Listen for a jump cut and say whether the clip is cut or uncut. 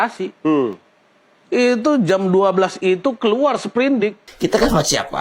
cut